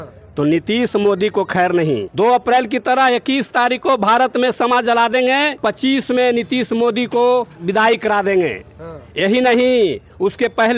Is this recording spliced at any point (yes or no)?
yes